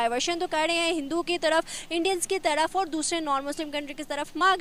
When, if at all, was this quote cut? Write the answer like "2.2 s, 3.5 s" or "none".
none